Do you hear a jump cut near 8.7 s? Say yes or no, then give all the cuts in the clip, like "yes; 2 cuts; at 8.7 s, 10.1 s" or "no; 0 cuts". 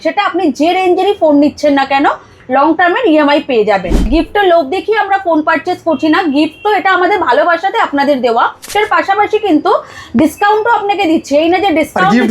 yes; 2 cuts; at 4.1 s, 8.7 s